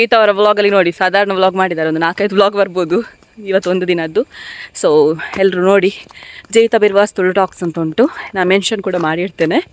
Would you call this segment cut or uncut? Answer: uncut